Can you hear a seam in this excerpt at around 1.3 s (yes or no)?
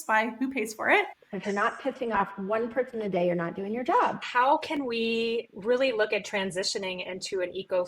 yes